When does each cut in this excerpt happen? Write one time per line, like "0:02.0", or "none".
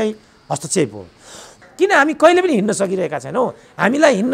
0:01.6